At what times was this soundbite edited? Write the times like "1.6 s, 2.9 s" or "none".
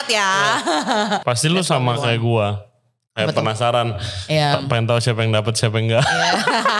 1.2 s